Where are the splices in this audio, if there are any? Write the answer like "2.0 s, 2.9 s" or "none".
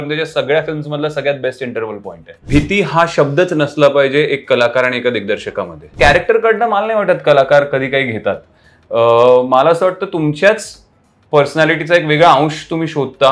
2.3 s, 5.9 s